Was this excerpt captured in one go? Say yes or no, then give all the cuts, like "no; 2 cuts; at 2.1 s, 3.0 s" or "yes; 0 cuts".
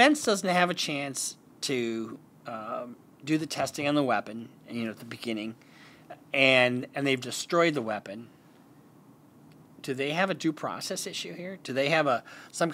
yes; 0 cuts